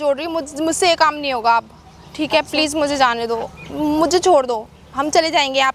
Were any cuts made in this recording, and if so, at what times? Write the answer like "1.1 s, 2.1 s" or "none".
none